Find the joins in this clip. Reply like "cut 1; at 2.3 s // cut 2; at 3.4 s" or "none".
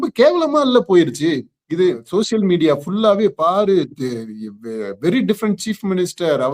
cut 1; at 2.0 s

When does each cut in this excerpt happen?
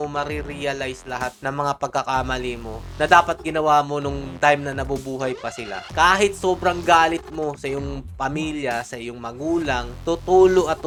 none

